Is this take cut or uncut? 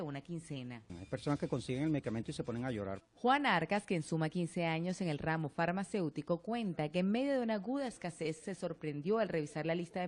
cut